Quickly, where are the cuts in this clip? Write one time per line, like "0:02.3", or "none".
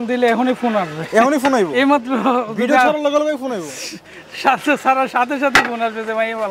none